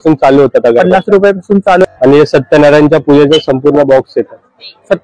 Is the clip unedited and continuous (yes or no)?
no